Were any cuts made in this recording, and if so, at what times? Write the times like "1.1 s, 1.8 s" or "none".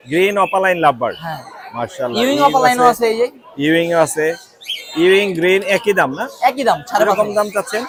none